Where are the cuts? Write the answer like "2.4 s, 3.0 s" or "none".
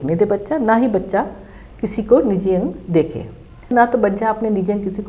3.7 s